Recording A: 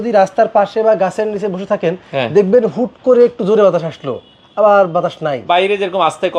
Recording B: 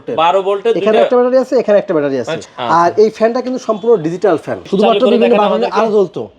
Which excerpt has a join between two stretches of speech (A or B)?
B